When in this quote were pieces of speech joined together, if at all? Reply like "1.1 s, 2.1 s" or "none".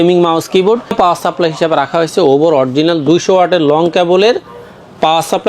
0.9 s